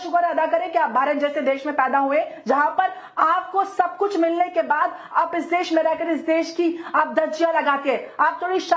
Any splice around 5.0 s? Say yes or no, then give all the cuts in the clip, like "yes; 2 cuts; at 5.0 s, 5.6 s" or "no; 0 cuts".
no; 0 cuts